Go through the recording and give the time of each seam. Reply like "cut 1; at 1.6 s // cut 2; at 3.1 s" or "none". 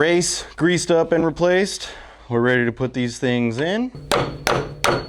cut 1; at 4.0 s